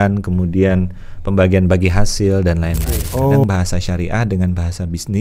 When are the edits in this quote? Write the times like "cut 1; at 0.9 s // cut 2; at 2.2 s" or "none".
cut 1; at 3.4 s